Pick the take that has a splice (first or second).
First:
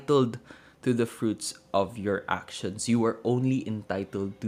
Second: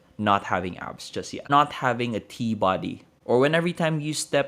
second